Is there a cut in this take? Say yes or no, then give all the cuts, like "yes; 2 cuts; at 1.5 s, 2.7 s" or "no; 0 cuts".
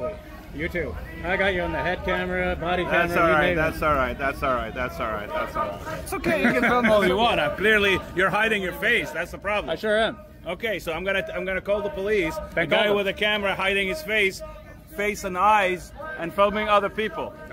yes; 1 cut; at 6.0 s